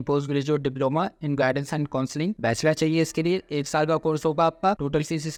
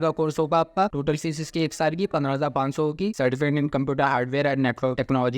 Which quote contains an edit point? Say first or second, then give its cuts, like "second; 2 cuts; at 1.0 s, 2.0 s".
second; 1 cut; at 3.1 s